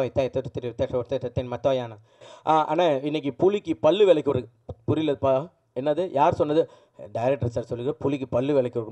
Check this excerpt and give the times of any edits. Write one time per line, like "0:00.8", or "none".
0:02.2